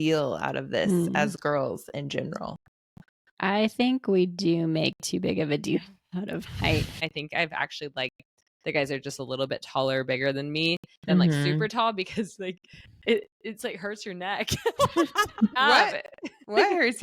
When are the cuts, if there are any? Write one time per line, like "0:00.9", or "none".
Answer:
0:07.0
0:15.5